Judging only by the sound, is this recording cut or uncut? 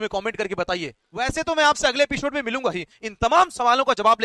uncut